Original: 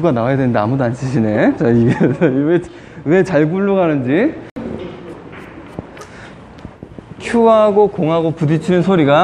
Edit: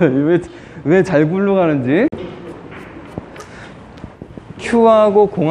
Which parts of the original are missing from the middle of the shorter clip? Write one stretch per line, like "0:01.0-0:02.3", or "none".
0:04.3-0:04.7

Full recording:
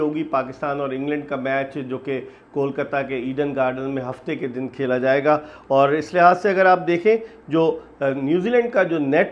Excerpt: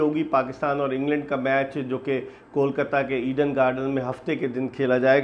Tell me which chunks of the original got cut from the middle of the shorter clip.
none

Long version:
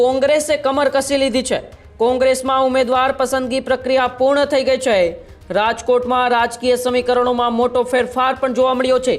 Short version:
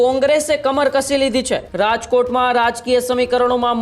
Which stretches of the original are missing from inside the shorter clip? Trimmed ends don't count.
0:01.6-0:05.4

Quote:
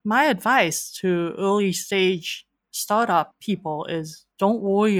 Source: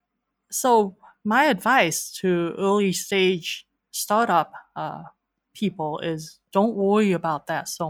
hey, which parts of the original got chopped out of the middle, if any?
0:04.6-0:05.5

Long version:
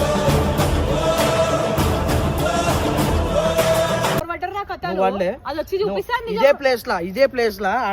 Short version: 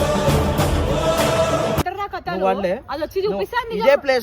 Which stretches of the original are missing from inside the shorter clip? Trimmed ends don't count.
0:01.8-0:04.4

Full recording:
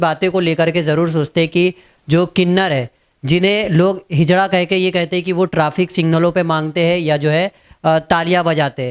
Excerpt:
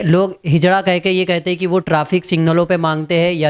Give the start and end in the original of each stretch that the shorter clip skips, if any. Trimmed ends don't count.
none

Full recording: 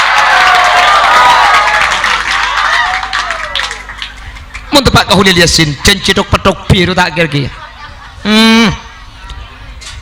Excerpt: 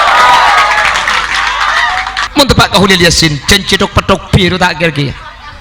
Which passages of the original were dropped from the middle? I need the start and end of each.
0:03.2-0:04.6

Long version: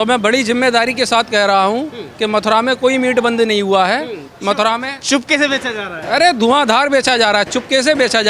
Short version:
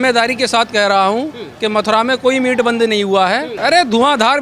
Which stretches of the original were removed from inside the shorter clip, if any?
0:04.1-0:06.0

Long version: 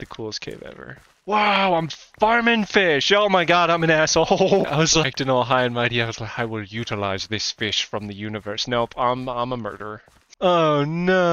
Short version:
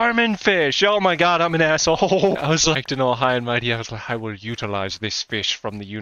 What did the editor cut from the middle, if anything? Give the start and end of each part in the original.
none

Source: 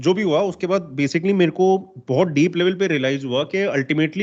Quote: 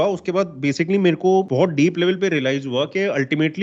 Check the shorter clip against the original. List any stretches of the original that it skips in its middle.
0:01.8-0:02.1

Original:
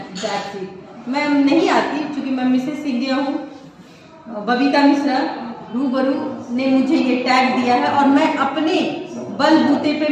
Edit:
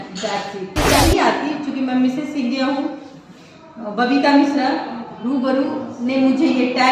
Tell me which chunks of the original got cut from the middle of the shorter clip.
0:01.0-0:01.5

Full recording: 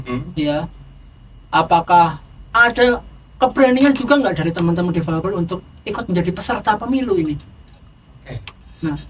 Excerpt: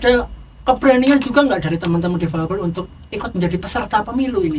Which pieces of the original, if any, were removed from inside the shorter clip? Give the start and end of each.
none

